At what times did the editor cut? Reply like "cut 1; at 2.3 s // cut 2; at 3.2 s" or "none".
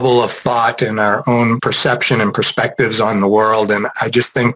cut 1; at 1.6 s